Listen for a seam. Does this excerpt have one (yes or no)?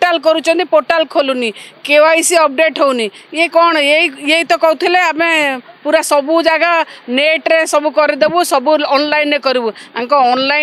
no